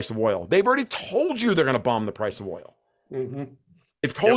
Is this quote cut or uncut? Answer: uncut